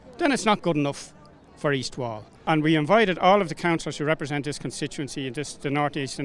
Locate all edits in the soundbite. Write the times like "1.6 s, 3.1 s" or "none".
2.3 s